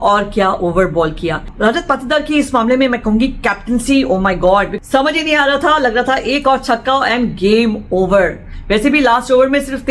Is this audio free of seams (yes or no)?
no